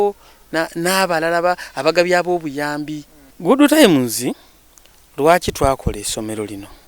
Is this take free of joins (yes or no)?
no